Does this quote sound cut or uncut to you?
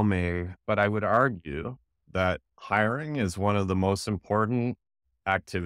uncut